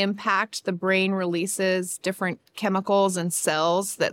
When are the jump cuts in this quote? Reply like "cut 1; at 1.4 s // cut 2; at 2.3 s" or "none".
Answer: none